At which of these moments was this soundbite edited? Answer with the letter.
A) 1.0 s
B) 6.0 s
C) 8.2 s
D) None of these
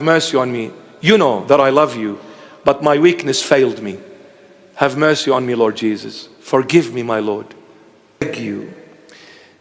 C